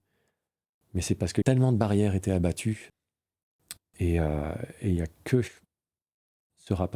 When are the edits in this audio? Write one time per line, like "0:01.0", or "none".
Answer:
0:01.4
0:02.9